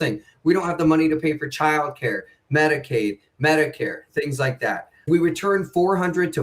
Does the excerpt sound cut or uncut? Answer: cut